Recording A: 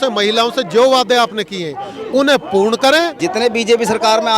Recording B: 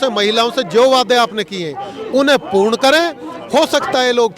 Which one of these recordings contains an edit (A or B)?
A